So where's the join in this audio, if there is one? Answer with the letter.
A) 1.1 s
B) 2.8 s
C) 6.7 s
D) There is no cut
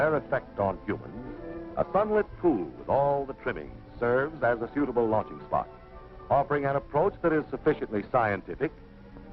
A